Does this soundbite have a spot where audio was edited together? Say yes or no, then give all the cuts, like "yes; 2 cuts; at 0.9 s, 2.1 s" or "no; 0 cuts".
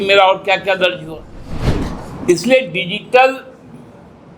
yes; 1 cut; at 1.6 s